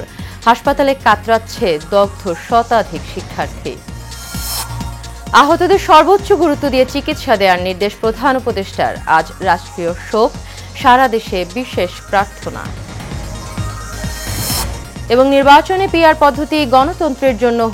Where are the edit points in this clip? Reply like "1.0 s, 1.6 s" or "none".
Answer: none